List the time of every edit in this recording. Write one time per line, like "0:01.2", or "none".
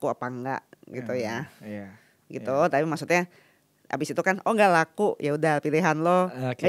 none